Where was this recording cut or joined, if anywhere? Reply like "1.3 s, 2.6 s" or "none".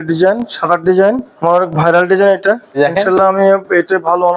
1.3 s, 2.7 s